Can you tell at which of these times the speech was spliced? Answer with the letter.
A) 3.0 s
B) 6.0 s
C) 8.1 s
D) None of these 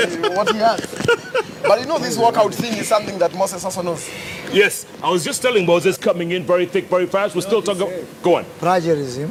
D